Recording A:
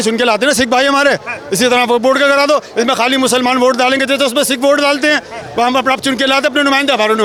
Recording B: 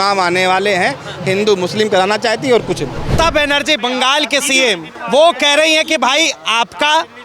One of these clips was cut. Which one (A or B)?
B